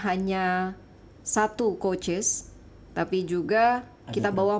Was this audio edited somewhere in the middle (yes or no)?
no